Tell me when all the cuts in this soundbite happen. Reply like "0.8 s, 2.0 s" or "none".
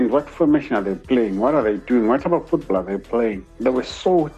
3.5 s